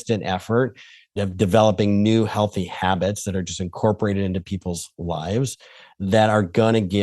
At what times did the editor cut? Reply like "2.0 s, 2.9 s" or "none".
1.1 s